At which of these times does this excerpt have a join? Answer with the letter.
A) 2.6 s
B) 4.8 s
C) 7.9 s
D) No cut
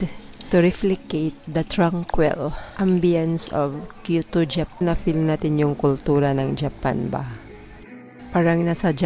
B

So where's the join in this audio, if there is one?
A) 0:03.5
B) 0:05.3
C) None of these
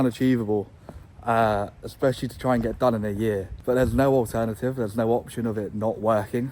A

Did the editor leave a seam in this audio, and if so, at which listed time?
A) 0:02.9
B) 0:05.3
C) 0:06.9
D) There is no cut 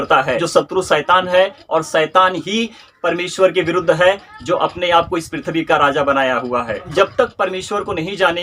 C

